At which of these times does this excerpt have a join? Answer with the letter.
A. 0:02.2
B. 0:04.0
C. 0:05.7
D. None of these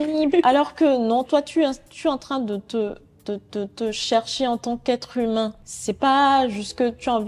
C